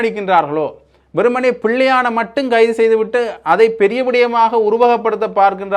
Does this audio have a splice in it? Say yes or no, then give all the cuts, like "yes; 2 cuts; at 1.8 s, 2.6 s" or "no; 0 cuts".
no; 0 cuts